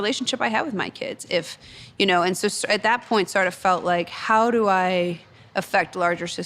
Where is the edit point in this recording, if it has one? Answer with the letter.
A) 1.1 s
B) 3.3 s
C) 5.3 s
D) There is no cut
D